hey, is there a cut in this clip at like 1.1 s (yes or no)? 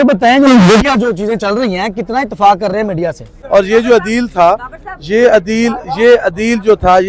no